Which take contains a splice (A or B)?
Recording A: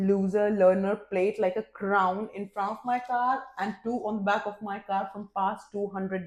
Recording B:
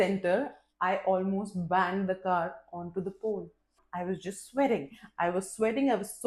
B